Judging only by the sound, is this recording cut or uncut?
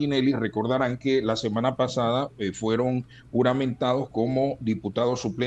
uncut